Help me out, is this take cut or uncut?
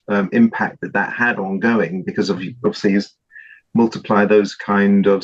cut